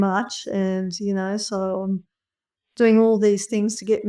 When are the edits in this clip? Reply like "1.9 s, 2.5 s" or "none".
none